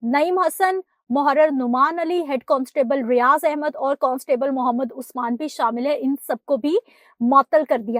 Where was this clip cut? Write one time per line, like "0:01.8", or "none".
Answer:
none

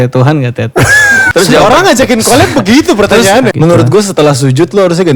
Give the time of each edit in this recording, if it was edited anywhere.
0:01.2
0:03.5

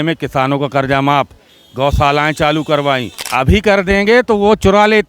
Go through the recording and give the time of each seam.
0:03.2

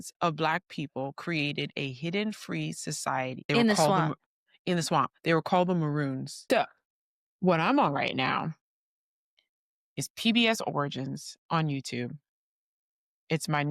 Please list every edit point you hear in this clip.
0:03.4
0:06.4

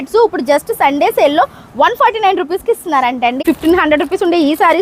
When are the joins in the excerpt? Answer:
0:03.4

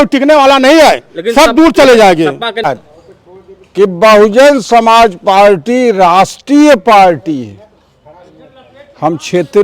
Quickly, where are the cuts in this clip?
0:02.6

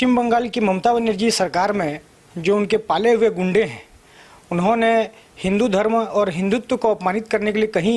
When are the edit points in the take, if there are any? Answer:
none

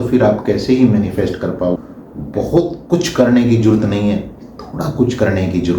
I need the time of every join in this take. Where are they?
0:01.8

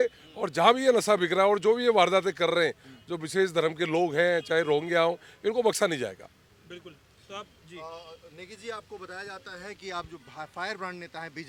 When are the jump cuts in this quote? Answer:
none

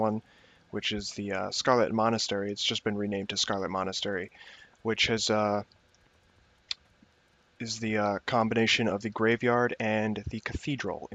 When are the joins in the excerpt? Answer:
none

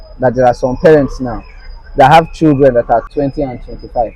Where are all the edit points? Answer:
0:03.1

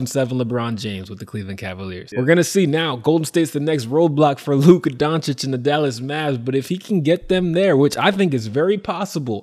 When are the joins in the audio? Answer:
0:02.0

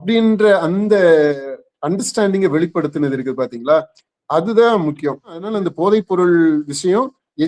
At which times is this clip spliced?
0:05.5

